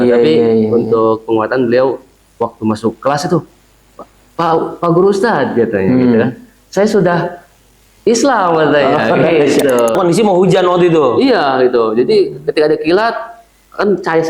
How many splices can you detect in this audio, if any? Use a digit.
1